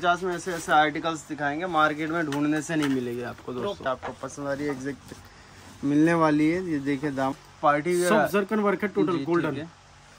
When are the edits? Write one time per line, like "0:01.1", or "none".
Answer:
0:03.9
0:07.3